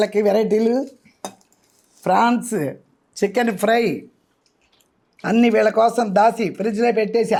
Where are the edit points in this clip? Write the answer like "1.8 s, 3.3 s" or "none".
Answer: none